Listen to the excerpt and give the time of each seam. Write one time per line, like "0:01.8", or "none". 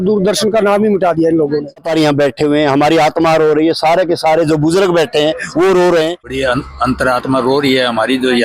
0:01.9
0:06.3